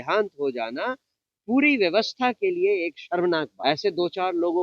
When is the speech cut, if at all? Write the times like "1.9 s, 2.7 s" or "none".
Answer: 3.5 s